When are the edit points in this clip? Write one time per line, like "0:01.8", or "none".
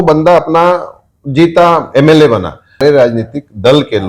0:03.1